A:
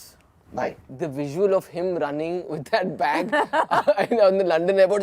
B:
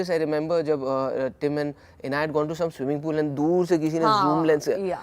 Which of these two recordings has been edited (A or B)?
A